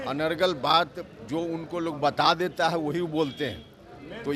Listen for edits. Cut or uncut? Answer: uncut